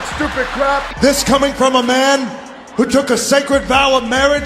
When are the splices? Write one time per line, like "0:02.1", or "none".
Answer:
0:00.9